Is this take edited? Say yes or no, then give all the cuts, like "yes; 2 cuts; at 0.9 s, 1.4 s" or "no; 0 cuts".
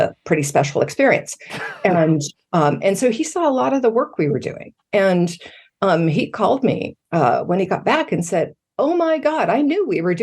no; 0 cuts